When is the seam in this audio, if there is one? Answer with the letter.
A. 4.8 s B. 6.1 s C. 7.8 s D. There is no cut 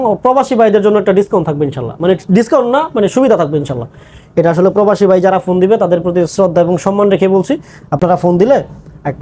D